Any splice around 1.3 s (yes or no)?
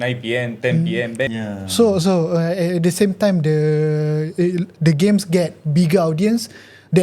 yes